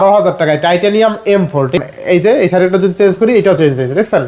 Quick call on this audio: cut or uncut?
cut